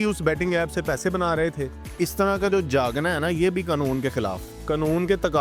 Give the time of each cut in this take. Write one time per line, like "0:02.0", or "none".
0:01.8
0:04.5